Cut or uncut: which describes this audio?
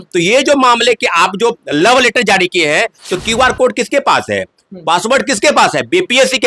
cut